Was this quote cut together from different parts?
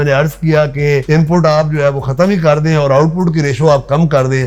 no; 0 cuts

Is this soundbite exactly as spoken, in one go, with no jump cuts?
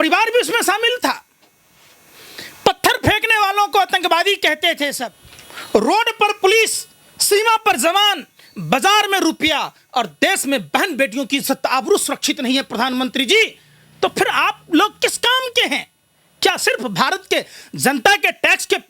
yes; 0 cuts

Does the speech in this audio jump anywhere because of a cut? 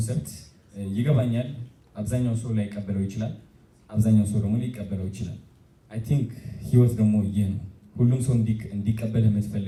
no; 0 cuts

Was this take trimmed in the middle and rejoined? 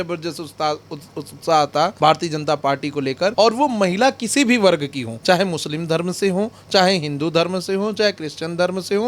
yes; 3 cuts; at 1.9 s, 3.3 s, 5.1 s

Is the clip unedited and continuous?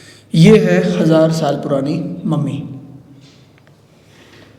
yes; 0 cuts

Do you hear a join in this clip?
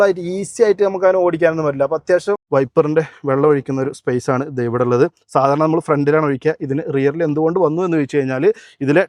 yes; 1 cut; at 2.4 s

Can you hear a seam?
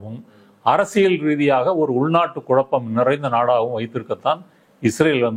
no; 0 cuts

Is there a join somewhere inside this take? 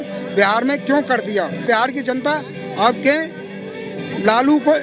yes; 1 cut; at 1.6 s

